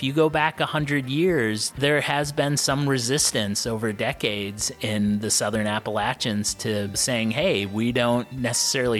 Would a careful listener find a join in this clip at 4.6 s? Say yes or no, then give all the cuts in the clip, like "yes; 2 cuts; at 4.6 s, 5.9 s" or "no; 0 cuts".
no; 1 cut; at 1.7 s